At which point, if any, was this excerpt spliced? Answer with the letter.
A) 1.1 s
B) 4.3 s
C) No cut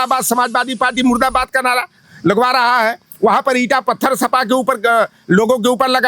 C